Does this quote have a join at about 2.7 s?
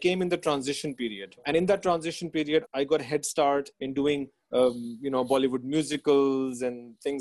yes; 3 cuts; at 1.4 s, 2.7 s, 3.7 s

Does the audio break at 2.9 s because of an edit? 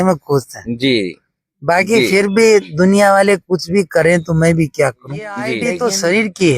no; 1 cut; at 5.5 s

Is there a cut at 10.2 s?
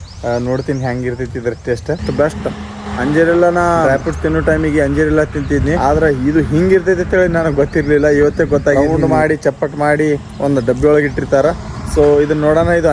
no; 5 cuts; at 2.0 s, 2.8 s, 3.8 s, 5.8 s, 8.8 s

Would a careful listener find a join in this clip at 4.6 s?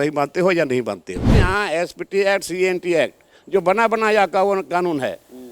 no; 1 cut; at 1.4 s

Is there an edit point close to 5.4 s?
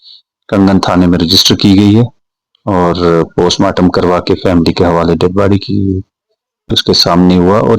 no; 1 cut; at 6.8 s

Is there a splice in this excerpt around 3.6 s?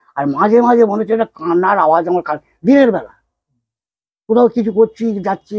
no; 0 cuts

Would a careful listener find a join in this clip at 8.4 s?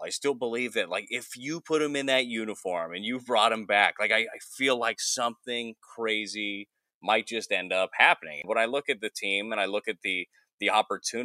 yes; 1 cut; at 8.4 s

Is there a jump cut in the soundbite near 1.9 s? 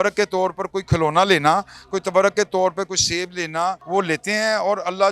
no; 1 cut; at 3.8 s

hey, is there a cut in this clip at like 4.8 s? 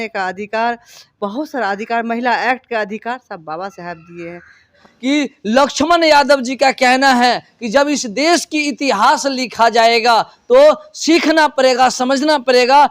yes; 1 cut; at 4.8 s

